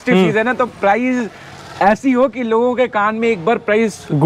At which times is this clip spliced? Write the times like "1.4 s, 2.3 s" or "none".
none